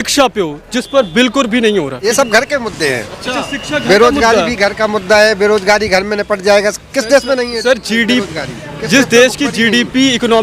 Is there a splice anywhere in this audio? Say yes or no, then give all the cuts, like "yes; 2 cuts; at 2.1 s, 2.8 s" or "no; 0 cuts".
yes; 1 cut; at 2.1 s